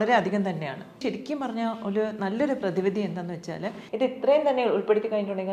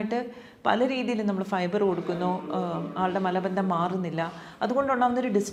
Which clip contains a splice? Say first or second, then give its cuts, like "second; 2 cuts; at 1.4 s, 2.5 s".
first; 2 cuts; at 1.0 s, 3.8 s